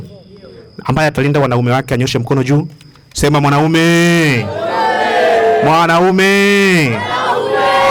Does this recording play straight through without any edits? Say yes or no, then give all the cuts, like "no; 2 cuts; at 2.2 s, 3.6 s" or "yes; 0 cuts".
yes; 0 cuts